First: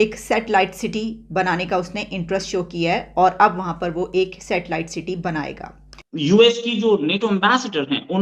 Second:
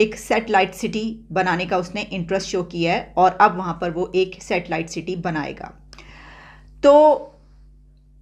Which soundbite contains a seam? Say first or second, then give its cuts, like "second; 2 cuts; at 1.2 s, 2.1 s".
first; 1 cut; at 6.0 s